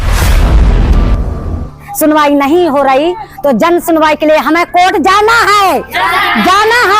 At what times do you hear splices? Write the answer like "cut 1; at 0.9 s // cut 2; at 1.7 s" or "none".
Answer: cut 1; at 1.8 s